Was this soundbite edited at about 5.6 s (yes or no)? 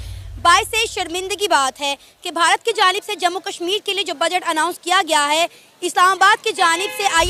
no